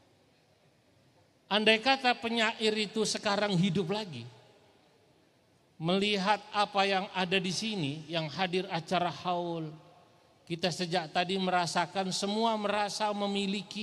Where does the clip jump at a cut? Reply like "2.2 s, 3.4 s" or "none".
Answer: none